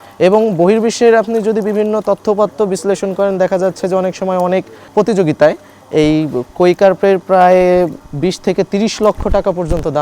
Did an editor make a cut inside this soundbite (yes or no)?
yes